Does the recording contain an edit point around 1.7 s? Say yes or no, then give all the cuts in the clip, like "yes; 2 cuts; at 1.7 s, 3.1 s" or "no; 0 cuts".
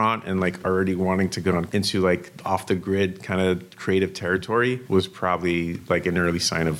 yes; 2 cuts; at 1.7 s, 4.8 s